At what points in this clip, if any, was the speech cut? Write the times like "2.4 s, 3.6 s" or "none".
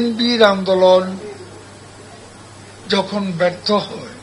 none

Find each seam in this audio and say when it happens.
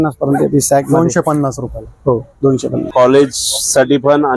2.9 s

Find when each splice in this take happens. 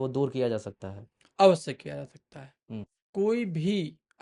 none

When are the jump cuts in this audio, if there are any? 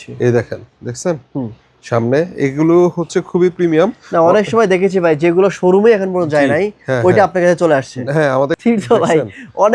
8.5 s

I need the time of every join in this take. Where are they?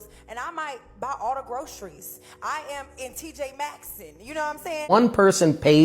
4.9 s

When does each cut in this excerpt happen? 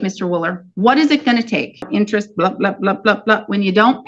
1.9 s

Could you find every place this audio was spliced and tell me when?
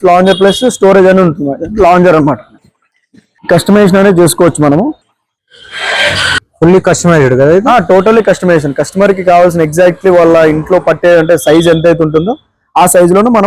none

